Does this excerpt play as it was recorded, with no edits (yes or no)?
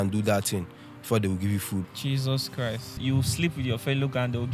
no